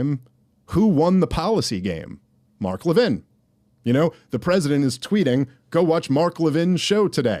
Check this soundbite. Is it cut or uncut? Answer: uncut